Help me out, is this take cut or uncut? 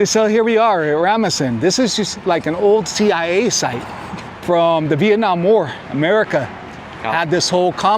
uncut